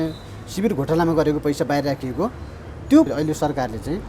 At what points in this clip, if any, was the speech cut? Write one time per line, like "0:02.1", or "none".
0:03.1